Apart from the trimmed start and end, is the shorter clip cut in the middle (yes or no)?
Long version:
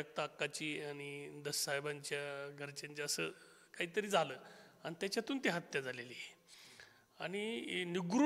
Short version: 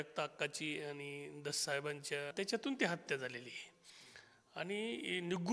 yes